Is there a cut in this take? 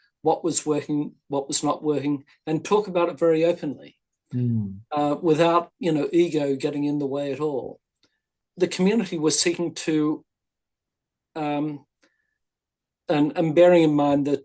yes; 1 cut; at 8.4 s

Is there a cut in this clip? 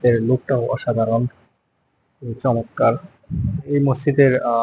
yes; 1 cut; at 3.6 s

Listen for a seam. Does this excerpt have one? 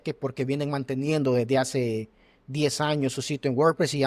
no; 0 cuts

